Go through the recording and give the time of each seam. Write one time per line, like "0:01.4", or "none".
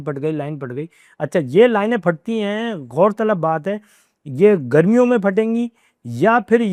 none